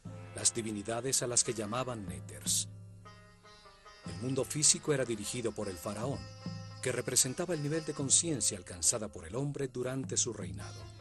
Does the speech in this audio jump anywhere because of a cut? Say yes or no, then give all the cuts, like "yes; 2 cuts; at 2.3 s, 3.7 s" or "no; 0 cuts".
no; 0 cuts